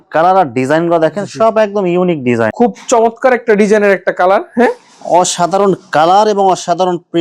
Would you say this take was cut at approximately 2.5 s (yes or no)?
yes